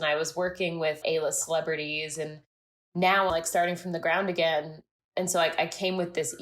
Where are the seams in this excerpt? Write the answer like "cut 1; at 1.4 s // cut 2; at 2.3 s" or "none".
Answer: cut 1; at 1.0 s // cut 2; at 3.3 s